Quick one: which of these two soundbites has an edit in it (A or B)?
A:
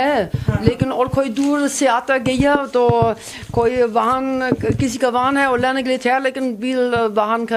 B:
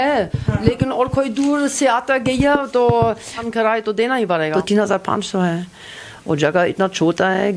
B